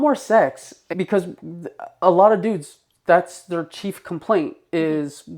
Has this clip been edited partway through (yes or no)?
yes